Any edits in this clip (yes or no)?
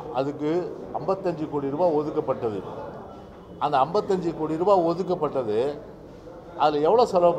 no